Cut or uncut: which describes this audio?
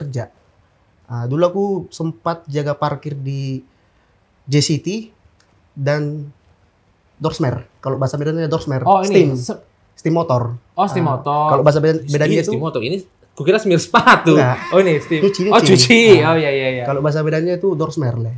uncut